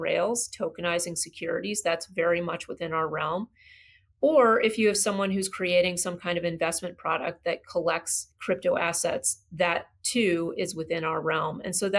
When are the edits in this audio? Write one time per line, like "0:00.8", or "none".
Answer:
0:08.3